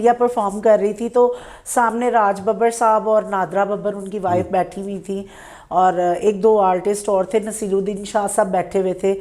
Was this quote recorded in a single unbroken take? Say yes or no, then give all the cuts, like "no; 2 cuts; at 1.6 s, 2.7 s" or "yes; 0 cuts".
yes; 0 cuts